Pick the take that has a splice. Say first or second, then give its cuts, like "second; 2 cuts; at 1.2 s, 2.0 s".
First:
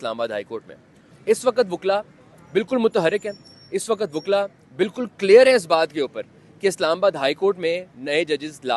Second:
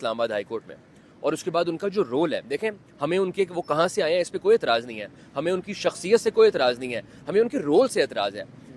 first; 1 cut; at 1.1 s